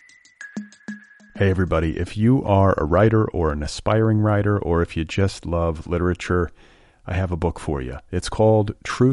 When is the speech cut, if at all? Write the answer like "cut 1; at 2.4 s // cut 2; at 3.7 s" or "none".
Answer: cut 1; at 0.9 s